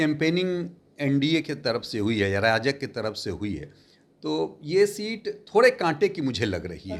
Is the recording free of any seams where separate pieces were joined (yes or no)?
yes